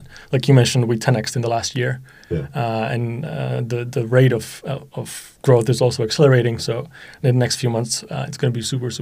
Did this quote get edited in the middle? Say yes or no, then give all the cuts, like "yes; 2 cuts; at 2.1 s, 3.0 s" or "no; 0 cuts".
no; 0 cuts